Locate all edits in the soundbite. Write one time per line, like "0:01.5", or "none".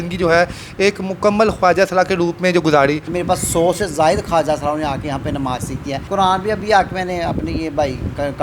0:03.0
0:06.0